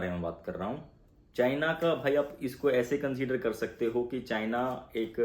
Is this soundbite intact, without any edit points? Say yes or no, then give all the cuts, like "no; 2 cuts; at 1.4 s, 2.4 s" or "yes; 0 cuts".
yes; 0 cuts